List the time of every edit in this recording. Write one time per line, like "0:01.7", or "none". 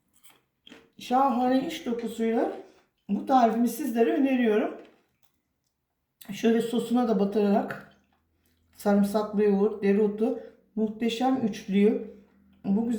none